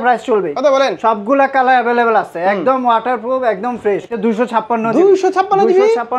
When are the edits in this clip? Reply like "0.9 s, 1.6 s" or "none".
4.1 s